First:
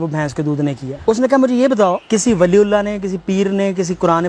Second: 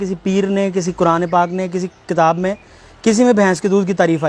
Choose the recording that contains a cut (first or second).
first